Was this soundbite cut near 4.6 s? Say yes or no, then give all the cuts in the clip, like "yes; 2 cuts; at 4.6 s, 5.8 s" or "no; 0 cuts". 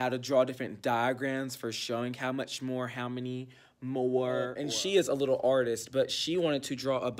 yes; 1 cut; at 4.6 s